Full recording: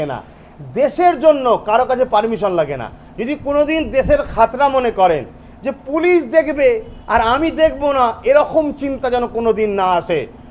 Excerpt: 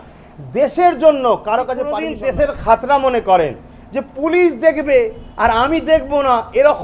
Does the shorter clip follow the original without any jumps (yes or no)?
no